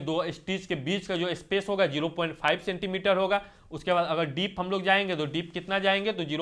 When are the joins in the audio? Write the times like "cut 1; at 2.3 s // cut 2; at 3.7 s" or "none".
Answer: none